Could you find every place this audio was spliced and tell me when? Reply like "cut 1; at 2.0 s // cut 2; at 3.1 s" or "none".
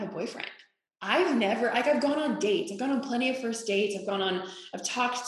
none